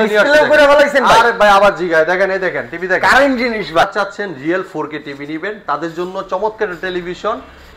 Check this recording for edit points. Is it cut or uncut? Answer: cut